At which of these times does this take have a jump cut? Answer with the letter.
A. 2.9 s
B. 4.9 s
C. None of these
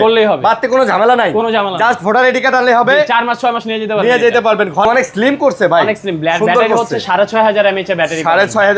B